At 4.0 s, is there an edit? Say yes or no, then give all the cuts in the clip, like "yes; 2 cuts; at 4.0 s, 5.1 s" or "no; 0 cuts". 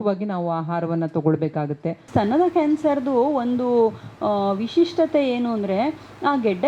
no; 1 cut; at 2.1 s